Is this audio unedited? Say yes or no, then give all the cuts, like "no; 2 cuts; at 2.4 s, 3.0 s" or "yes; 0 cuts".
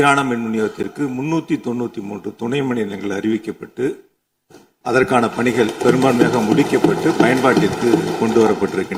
yes; 0 cuts